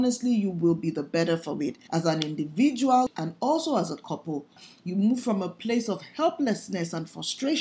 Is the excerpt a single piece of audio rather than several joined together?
no; 3 cuts; at 1.8 s, 3.1 s, 4.7 s

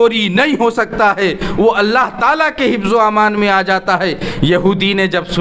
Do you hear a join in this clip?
no; 0 cuts

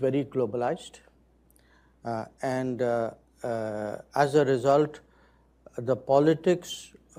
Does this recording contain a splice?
no; 0 cuts

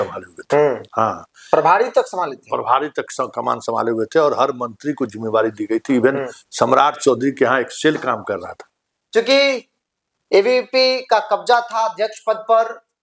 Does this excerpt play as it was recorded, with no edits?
no; 1 cut; at 8.6 s

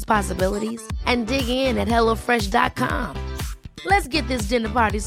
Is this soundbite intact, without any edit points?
yes; 0 cuts

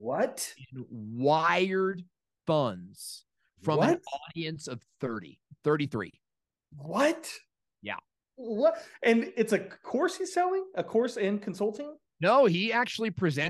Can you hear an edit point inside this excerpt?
no; 0 cuts

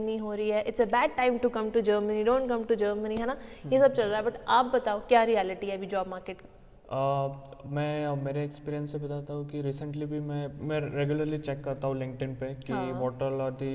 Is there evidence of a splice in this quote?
no; 0 cuts

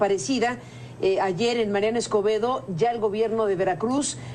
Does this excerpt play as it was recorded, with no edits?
no; 1 cut; at 1.1 s

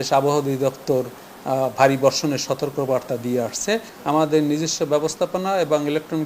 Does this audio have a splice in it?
yes; 1 cut; at 3.9 s

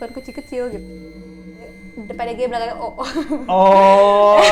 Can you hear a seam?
yes; 1 cut; at 1.4 s

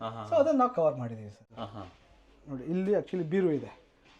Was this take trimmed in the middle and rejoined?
yes; 1 cut; at 1.9 s

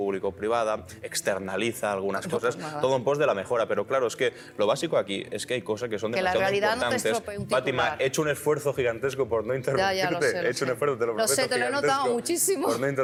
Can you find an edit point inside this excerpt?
no; 0 cuts

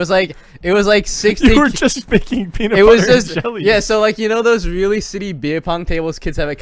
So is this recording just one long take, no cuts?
yes; 0 cuts

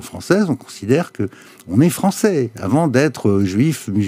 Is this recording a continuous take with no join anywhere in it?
yes; 0 cuts

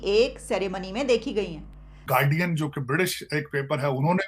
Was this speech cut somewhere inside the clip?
yes; 1 cut; at 2.0 s

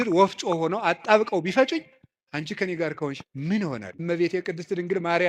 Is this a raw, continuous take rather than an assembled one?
no; 1 cut; at 3.9 s

